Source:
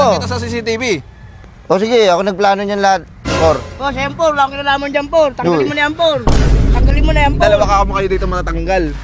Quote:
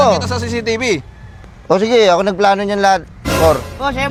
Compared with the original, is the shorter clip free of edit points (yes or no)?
yes